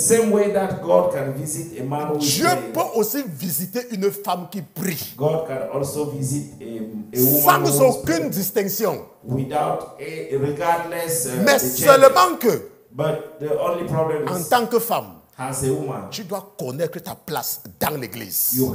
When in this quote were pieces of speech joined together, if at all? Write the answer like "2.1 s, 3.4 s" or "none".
none